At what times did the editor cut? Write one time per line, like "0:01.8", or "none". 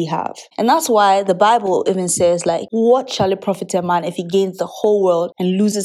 none